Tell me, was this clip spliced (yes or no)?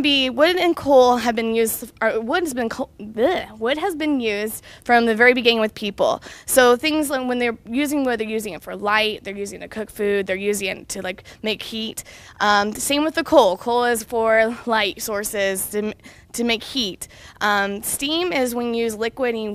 yes